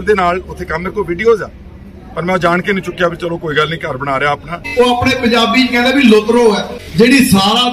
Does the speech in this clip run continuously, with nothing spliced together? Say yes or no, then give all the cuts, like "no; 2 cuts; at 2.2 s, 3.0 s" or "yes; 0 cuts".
no; 2 cuts; at 4.6 s, 6.8 s